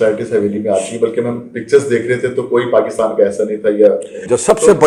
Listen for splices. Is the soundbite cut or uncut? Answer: uncut